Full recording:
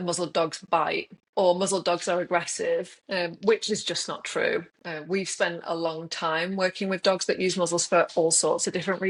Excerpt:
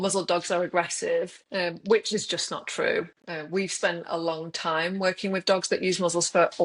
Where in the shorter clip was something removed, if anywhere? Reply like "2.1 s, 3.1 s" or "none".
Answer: none